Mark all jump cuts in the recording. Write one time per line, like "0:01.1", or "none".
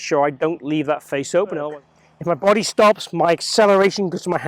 0:01.7